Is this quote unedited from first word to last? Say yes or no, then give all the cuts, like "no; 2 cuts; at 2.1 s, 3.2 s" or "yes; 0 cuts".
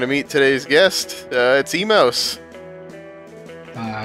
yes; 0 cuts